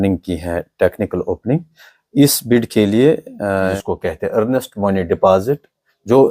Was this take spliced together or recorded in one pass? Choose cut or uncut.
cut